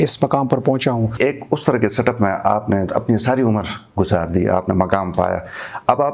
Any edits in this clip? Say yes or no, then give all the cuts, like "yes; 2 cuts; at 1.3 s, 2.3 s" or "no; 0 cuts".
yes; 1 cut; at 1.2 s